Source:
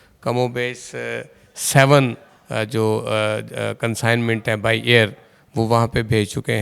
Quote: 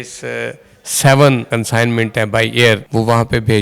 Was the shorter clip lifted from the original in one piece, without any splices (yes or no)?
no